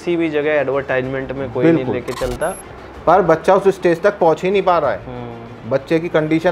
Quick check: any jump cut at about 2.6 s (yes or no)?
yes